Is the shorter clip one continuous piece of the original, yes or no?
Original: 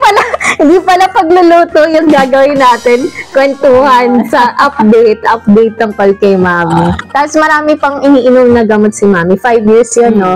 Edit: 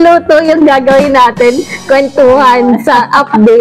yes